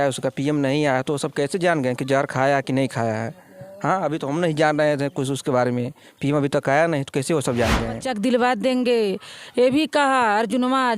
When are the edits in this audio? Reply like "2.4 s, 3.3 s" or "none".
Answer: 8.1 s

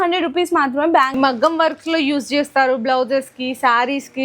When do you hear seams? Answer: 1.1 s

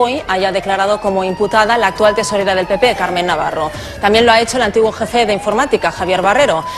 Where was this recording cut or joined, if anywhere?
3.0 s

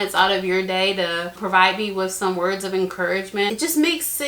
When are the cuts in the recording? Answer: 1.3 s, 3.5 s

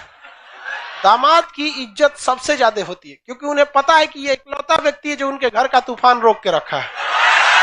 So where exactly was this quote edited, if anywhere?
0.9 s

